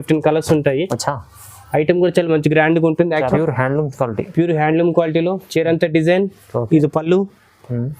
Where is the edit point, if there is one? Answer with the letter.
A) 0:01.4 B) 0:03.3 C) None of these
B